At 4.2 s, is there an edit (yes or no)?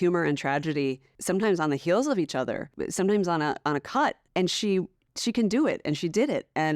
yes